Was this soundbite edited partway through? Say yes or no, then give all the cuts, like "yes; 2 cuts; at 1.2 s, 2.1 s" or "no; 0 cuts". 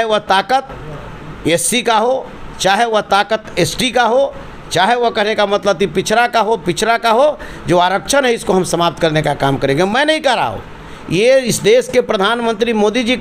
no; 0 cuts